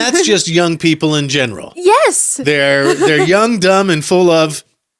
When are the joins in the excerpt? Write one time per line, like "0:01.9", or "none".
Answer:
none